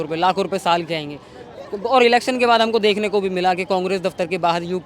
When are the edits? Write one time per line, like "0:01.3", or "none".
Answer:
none